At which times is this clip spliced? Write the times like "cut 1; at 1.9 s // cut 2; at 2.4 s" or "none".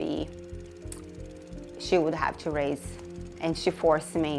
cut 1; at 3.3 s